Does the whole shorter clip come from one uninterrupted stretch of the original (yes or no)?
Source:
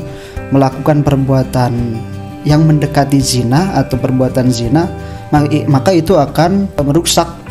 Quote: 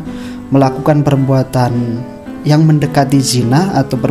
yes